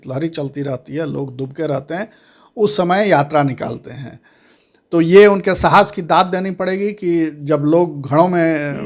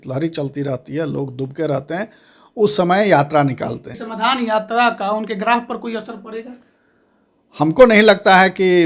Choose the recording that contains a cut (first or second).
second